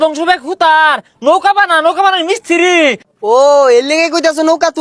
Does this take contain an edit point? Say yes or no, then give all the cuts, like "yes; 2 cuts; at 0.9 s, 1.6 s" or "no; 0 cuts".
yes; 1 cut; at 3.1 s